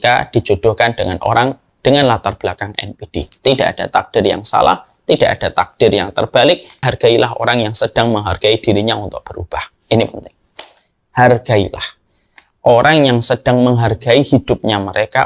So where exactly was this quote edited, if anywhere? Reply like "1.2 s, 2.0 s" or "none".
6.9 s